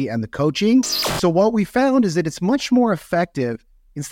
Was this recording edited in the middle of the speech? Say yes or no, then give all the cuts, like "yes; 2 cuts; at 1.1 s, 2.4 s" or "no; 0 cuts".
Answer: yes; 1 cut; at 1.0 s